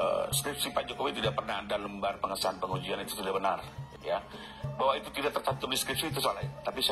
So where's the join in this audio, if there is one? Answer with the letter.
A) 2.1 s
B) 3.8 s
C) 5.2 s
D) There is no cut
B